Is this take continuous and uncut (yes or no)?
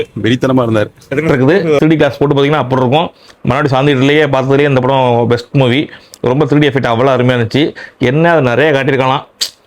no